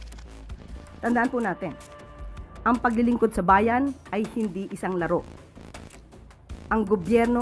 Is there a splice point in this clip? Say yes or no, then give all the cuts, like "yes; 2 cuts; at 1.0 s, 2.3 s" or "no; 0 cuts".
yes; 2 cuts; at 5.2 s, 6.7 s